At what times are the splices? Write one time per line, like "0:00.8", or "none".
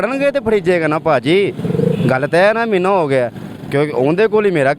none